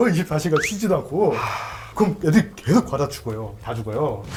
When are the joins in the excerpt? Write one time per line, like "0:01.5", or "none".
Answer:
none